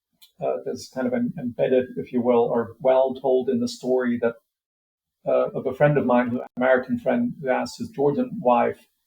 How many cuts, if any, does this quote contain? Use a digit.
1